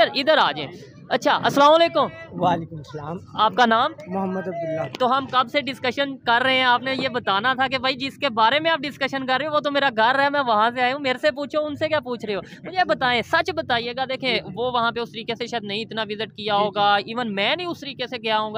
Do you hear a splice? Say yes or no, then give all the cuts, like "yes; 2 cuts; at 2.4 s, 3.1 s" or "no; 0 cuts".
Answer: no; 0 cuts